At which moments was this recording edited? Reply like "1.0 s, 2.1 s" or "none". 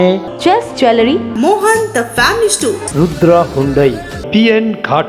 4.1 s

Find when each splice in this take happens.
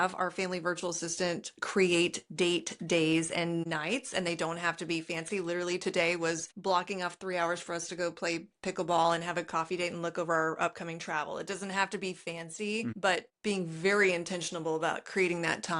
3.7 s, 6.5 s, 13.0 s

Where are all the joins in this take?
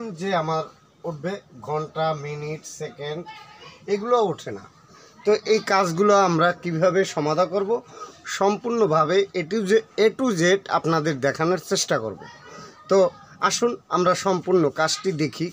none

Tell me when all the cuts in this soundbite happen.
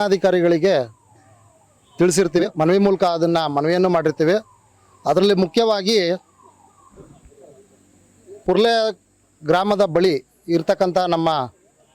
2.4 s

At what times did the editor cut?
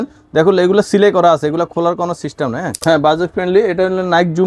2.7 s

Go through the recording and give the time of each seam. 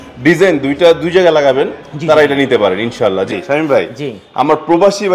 3.3 s

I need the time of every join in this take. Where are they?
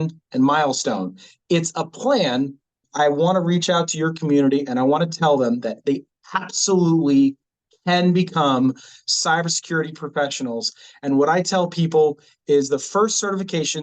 2.8 s

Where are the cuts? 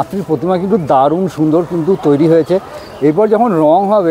none

